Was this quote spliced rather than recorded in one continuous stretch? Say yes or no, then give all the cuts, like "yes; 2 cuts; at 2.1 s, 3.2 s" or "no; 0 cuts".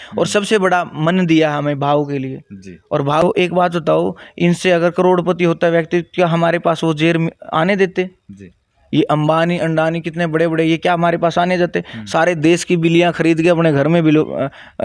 yes; 1 cut; at 3.2 s